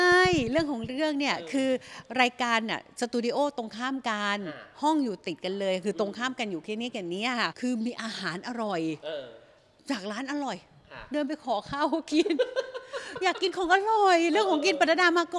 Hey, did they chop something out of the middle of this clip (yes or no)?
yes